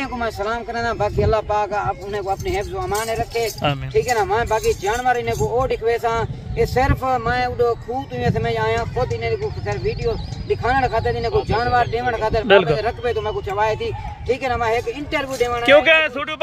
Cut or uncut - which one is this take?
uncut